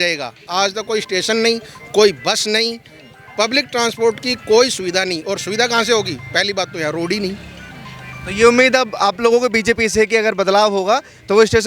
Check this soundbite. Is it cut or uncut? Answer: uncut